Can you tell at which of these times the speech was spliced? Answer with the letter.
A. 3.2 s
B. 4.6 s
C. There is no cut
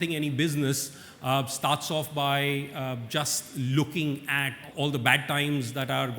B